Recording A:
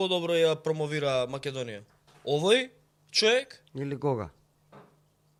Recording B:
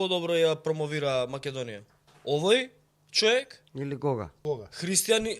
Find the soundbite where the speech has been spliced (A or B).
B